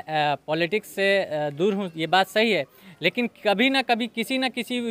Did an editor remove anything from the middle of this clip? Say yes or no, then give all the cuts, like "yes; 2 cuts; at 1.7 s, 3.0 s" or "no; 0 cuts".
no; 0 cuts